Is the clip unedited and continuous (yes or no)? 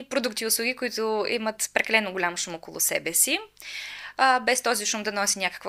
yes